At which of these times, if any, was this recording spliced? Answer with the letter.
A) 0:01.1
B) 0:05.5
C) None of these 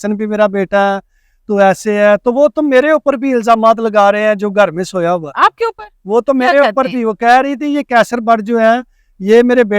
C